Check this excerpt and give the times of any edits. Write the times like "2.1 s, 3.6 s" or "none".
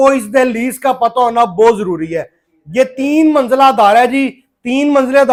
none